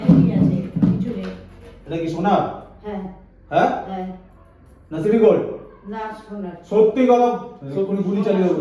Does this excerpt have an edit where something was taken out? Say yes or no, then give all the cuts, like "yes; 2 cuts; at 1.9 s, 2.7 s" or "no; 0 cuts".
no; 0 cuts